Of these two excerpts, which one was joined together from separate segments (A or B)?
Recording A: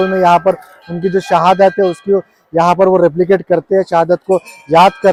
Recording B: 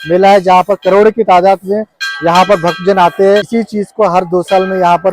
B